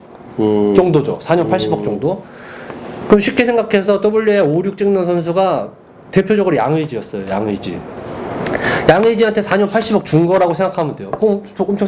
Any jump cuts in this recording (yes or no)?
no